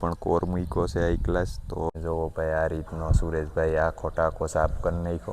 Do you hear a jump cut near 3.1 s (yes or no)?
no